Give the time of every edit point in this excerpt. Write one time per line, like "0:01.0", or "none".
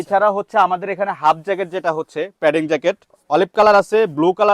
0:03.2